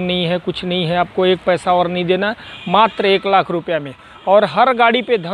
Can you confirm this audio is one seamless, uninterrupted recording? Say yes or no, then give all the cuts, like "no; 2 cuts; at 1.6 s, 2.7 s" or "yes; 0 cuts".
yes; 0 cuts